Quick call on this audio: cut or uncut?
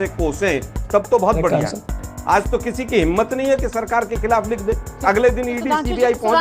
cut